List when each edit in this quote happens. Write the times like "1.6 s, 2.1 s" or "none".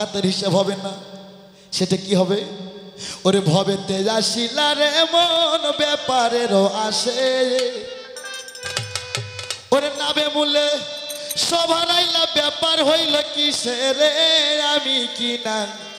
none